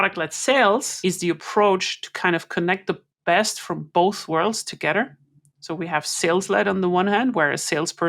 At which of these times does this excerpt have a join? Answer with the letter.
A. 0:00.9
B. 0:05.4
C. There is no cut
A